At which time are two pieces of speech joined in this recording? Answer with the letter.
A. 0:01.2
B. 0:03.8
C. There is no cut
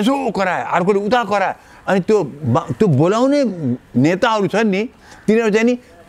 C